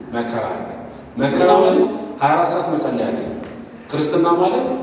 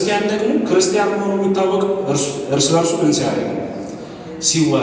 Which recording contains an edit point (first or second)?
first